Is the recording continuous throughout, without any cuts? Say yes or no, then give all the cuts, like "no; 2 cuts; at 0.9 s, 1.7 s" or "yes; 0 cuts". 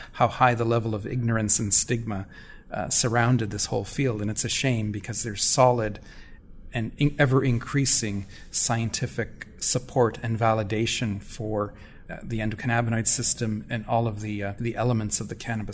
no; 2 cuts; at 11.9 s, 14.5 s